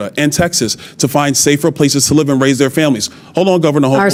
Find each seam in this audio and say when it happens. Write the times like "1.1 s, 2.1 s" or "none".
none